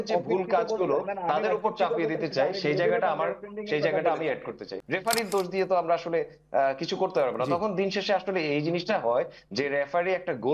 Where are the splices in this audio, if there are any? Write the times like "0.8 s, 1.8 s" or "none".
4.7 s